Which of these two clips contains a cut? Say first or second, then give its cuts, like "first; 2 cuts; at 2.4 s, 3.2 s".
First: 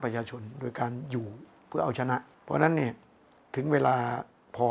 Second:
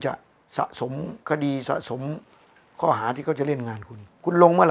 first; 1 cut; at 2.3 s